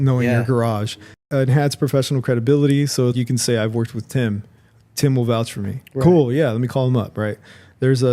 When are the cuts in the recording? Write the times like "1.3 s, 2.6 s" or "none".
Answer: 1.2 s

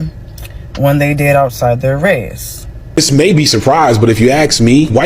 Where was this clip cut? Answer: 2.8 s

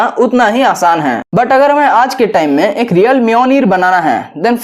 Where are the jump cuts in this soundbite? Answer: 1.2 s

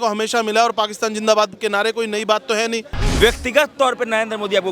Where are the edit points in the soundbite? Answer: 3.0 s

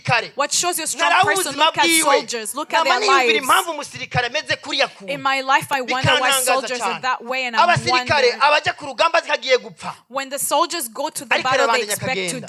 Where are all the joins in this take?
none

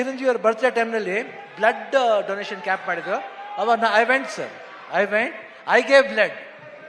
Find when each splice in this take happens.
none

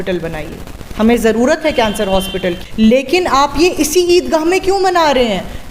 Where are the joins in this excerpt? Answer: 2.6 s

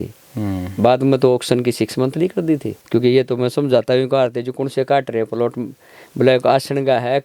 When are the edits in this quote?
2.7 s

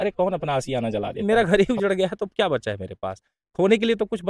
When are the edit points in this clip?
1.2 s

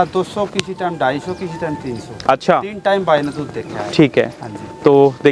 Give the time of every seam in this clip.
none

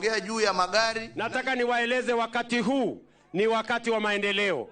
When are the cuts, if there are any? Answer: 1.1 s

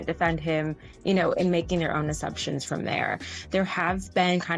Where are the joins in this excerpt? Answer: 3.4 s

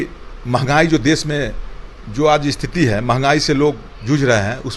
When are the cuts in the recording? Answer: none

